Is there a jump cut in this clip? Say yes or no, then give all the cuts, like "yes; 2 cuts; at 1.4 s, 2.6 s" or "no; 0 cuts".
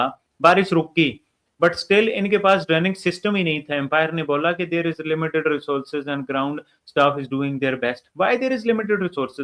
no; 0 cuts